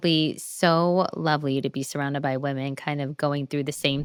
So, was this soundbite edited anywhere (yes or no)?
no